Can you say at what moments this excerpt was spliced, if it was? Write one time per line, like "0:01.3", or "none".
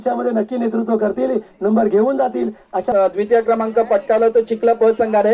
0:02.9